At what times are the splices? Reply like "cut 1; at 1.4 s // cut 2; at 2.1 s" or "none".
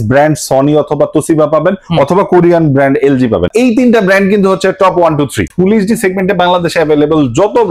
cut 1; at 3.5 s // cut 2; at 5.5 s